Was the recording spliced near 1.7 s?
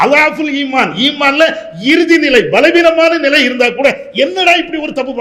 no; 0 cuts

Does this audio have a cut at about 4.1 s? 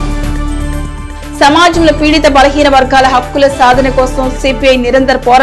no; 1 cut; at 1.3 s

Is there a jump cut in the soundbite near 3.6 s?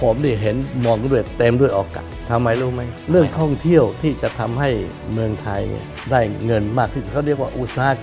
no; 1 cut; at 2.1 s

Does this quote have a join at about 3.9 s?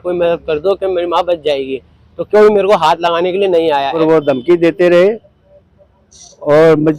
yes; 1 cut; at 3.9 s

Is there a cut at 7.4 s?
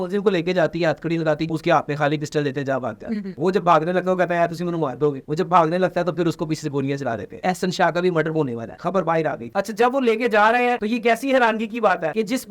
yes; 2 cuts; at 1.4 s, 7.4 s

